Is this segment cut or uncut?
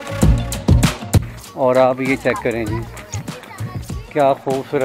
cut